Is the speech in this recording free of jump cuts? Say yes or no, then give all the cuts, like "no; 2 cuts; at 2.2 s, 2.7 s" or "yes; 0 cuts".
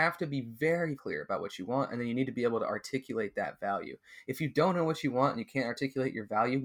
no; 1 cut; at 1.0 s